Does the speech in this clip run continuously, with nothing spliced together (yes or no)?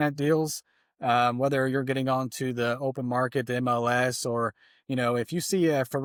yes